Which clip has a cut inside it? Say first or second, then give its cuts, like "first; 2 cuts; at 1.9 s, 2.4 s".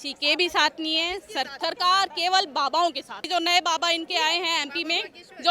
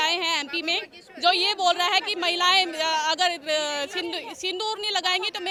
first; 2 cuts; at 1.5 s, 3.2 s